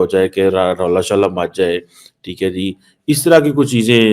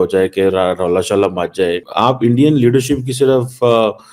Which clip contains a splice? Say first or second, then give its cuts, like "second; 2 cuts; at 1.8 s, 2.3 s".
second; 1 cut; at 1.9 s